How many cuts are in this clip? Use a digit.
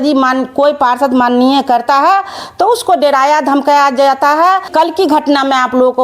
1